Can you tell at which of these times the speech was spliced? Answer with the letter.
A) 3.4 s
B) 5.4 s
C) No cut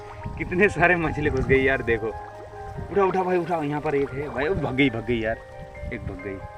C